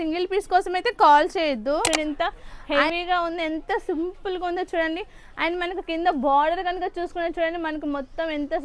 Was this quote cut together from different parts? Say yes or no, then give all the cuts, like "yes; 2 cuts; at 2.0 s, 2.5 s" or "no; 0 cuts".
yes; 1 cut; at 1.9 s